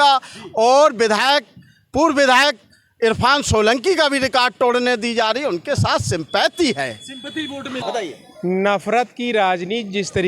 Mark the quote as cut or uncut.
cut